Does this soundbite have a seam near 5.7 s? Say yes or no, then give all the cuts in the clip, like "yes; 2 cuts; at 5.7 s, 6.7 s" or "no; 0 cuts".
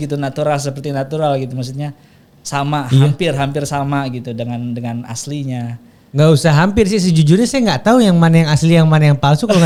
no; 0 cuts